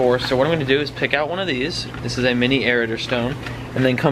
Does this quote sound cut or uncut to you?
uncut